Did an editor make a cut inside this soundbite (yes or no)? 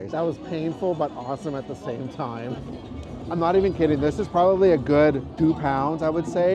yes